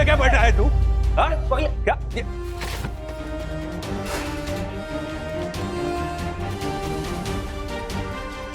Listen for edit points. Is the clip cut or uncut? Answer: uncut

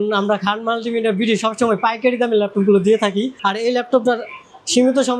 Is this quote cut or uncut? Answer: uncut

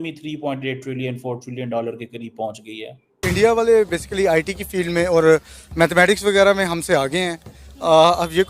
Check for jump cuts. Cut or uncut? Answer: cut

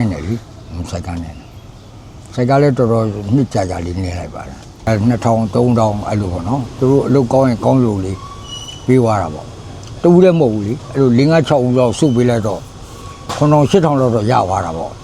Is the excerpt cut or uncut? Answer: cut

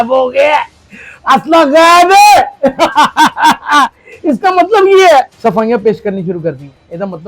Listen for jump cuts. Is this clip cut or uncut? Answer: cut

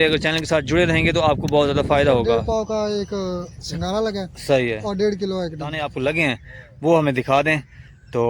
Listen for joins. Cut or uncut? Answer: cut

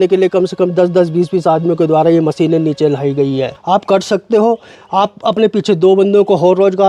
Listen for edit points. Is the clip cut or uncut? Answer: cut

